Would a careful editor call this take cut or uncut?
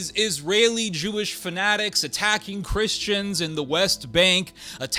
uncut